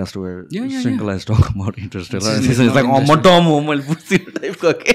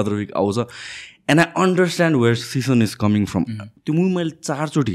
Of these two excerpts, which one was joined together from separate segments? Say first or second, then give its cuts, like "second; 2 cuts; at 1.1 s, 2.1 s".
second; 1 cut; at 3.7 s